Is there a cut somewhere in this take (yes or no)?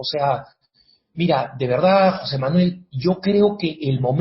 yes